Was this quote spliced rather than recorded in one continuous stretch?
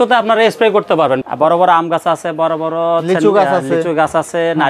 yes; 1 cut; at 1.2 s

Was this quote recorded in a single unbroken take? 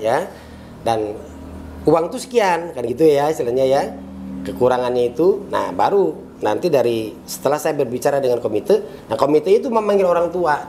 yes; 0 cuts

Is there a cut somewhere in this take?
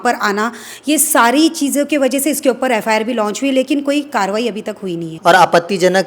yes; 1 cut; at 5.1 s

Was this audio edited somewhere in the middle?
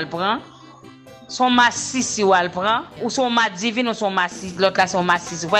yes; 1 cut; at 2.9 s

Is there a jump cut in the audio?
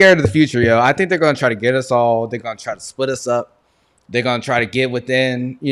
no; 0 cuts

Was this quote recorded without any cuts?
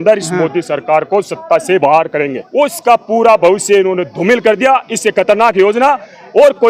no; 1 cut; at 2.4 s

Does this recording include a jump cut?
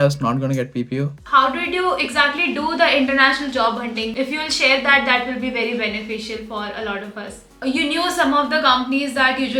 yes; 2 cuts; at 1.2 s, 7.6 s

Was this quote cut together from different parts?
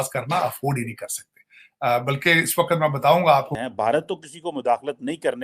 yes; 1 cut; at 3.6 s

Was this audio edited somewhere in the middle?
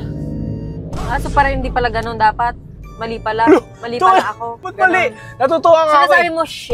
no; 0 cuts

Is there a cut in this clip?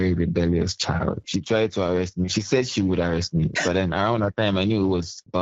yes; 1 cut; at 1.2 s

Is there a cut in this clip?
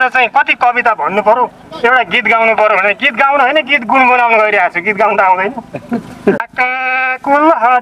yes; 1 cut; at 6.4 s

